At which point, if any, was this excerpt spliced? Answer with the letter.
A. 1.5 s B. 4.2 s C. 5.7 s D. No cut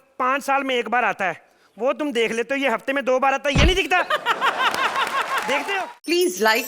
C